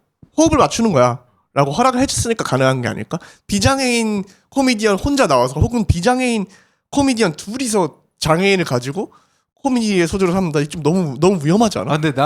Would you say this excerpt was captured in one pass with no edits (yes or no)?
yes